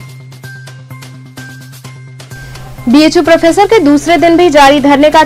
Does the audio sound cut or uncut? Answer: uncut